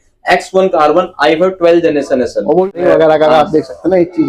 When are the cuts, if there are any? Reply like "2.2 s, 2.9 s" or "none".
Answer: 2.7 s